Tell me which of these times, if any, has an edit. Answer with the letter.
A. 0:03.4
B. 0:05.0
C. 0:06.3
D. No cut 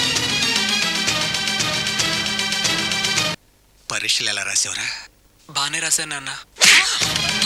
A